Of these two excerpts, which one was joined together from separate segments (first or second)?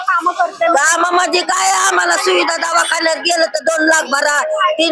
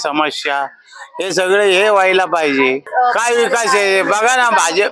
second